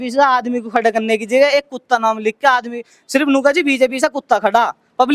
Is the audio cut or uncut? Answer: uncut